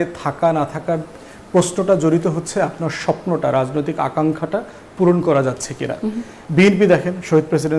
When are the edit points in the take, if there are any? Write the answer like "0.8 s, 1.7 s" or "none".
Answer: none